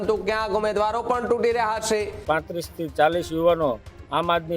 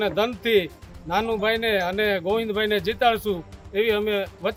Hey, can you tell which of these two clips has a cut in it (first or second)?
first